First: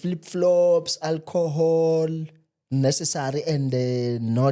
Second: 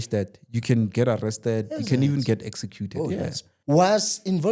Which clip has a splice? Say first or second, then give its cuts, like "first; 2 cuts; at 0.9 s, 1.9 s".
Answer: second; 1 cut; at 3.5 s